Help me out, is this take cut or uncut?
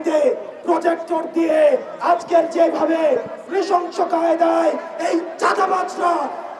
uncut